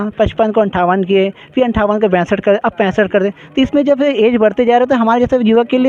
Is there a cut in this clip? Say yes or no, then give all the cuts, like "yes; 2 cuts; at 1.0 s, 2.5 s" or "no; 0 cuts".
no; 0 cuts